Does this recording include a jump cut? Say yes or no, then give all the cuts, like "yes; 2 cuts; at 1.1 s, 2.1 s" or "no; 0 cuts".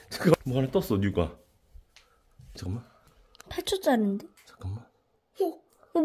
yes; 1 cut; at 2.7 s